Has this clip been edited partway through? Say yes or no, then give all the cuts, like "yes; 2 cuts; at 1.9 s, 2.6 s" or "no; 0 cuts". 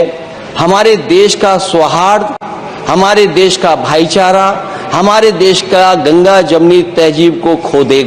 no; 0 cuts